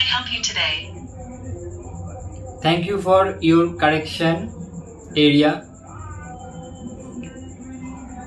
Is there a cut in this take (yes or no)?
yes